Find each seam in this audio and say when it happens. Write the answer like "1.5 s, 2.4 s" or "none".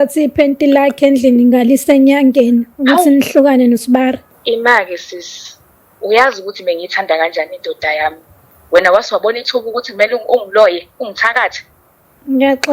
4.3 s, 8.5 s